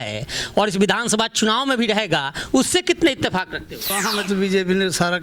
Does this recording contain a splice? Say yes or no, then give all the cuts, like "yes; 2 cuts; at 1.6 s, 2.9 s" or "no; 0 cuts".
yes; 1 cut; at 4.0 s